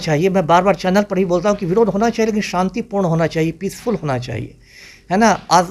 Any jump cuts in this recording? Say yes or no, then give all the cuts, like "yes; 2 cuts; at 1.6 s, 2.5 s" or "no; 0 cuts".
no; 0 cuts